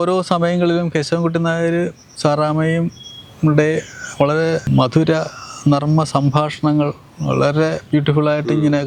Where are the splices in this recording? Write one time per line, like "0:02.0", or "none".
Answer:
none

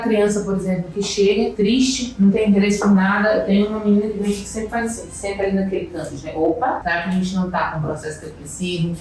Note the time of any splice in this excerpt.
0:01.5
0:06.8

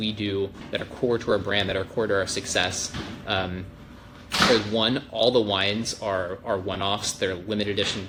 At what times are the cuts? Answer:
none

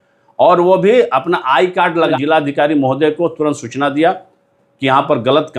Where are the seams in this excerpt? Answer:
0:02.1

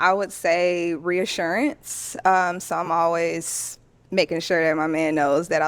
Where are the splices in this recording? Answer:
none

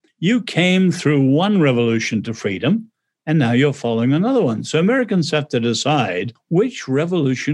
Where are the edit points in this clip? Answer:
0:06.4

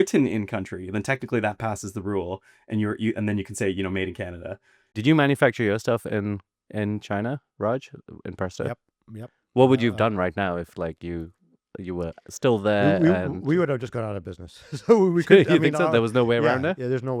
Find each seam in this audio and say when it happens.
0:04.9

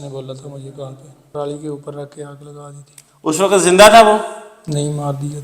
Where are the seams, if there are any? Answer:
0:01.3

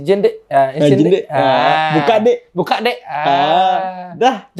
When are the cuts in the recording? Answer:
none

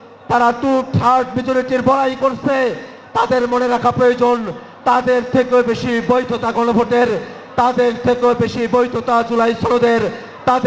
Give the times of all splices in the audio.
none

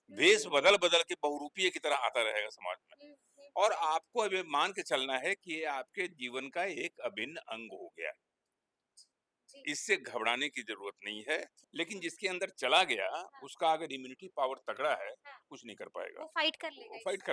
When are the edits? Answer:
0:11.6

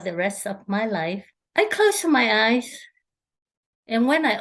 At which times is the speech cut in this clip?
0:01.3

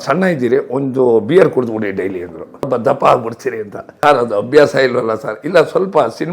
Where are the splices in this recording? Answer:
0:02.7
0:03.8

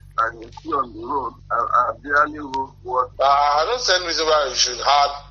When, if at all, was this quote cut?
0:03.1

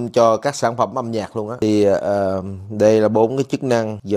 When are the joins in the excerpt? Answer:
none

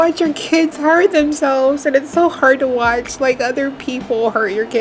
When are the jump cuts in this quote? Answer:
none

